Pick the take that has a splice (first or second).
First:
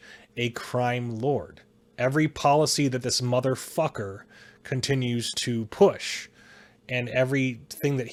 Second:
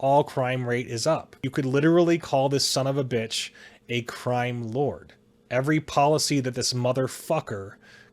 second